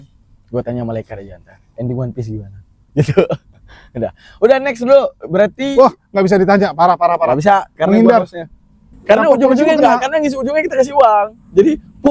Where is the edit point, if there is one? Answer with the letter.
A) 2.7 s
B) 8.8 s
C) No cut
B